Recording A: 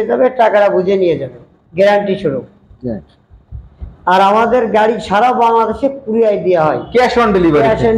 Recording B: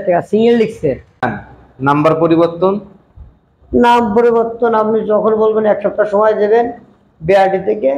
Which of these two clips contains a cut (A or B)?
B